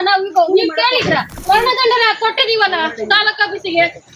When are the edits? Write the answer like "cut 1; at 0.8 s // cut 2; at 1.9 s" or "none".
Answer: cut 1; at 1.4 s